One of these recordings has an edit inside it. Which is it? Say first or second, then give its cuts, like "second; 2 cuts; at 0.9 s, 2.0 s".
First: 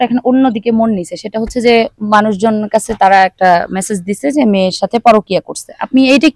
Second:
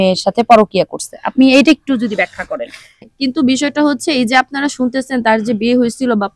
second; 1 cut; at 3.1 s